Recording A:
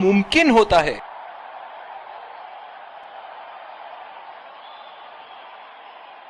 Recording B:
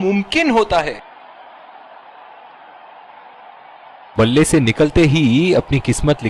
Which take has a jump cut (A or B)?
B